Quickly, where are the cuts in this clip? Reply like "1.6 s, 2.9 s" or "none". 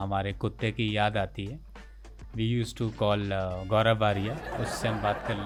none